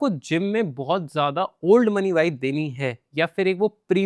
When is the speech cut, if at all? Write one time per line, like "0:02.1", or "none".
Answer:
none